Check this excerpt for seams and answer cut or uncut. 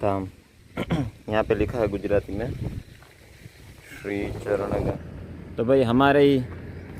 cut